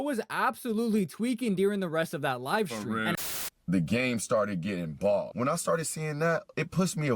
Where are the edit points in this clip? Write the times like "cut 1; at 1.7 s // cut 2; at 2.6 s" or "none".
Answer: cut 1; at 3.2 s